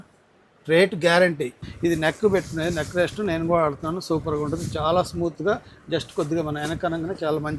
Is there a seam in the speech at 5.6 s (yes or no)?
no